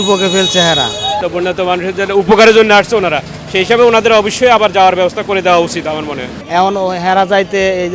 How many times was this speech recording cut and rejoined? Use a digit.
2